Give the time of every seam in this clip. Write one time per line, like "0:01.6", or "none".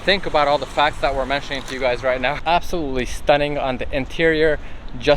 0:02.4